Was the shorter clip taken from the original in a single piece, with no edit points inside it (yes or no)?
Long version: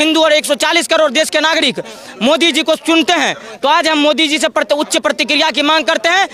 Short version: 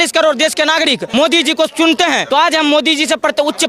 no